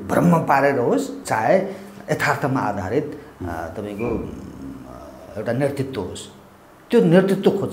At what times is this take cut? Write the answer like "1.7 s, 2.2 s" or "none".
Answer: 1.2 s